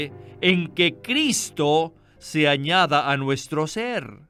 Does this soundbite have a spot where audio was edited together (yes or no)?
no